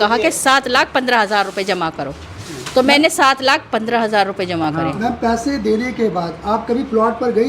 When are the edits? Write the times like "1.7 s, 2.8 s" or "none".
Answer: none